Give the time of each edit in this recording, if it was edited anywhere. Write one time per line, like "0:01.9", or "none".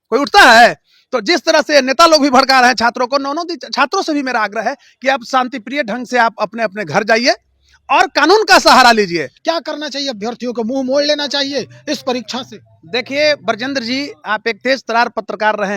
0:09.3

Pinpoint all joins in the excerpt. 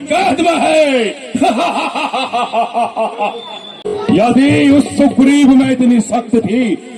0:04.0

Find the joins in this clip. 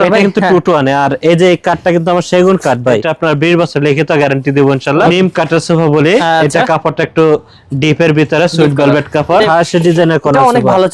0:03.1
0:05.1
0:09.4

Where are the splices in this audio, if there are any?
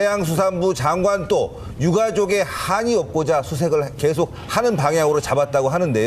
none

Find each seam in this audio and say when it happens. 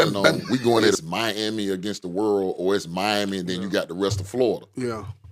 0:01.0

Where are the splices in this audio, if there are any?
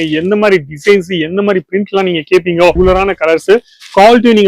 0:02.8

